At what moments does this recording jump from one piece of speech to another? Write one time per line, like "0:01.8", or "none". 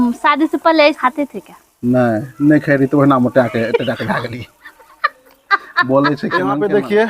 0:01.0
0:06.3